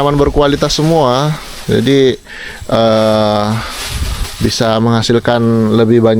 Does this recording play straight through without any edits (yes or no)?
yes